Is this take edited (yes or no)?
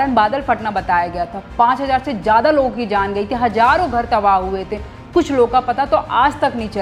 no